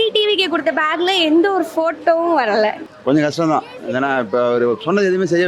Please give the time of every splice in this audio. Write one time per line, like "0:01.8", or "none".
0:02.9